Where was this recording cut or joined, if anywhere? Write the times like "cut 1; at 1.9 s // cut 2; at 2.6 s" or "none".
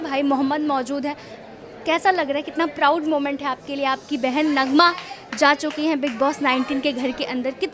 none